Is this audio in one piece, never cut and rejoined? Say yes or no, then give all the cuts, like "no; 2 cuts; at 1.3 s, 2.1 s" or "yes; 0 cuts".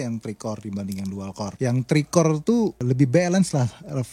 no; 2 cuts; at 1.5 s, 2.8 s